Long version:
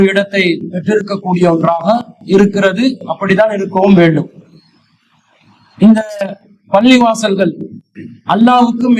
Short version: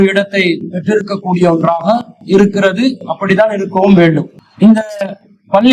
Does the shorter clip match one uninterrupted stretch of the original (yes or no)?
no